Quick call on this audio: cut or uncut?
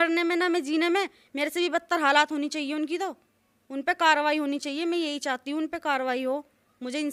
uncut